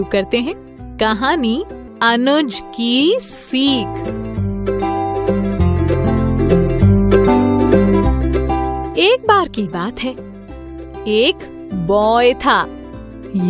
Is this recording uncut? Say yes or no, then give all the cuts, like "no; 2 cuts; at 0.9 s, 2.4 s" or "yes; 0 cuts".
no; 2 cuts; at 1.8 s, 3.9 s